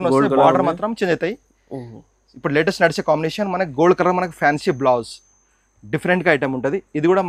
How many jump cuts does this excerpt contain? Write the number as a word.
zero